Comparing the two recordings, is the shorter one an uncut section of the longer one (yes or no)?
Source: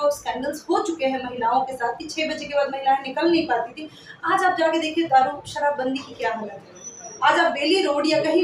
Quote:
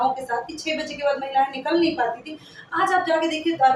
yes